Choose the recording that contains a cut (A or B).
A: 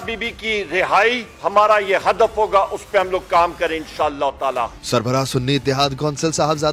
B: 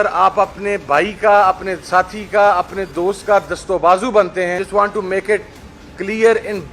B